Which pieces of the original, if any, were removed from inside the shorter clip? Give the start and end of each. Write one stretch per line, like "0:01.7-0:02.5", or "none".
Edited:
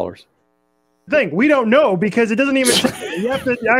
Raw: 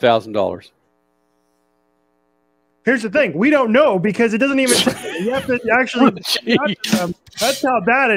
0:01.5-0:03.1